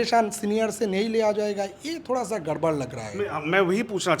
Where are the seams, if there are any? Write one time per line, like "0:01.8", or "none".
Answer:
none